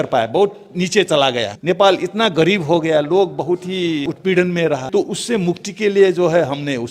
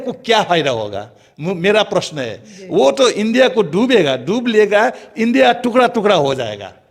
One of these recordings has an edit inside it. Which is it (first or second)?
first